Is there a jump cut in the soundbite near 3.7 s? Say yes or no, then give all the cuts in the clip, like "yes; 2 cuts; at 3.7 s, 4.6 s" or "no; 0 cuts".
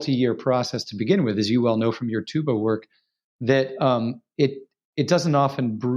no; 0 cuts